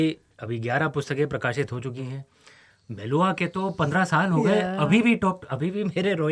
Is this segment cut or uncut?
cut